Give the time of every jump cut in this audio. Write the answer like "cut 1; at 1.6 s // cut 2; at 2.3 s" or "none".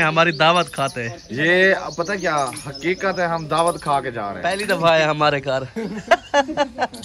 cut 1; at 4.4 s